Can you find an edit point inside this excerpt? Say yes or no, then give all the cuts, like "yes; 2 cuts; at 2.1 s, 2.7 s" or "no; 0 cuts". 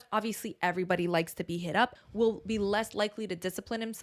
yes; 1 cut; at 1.9 s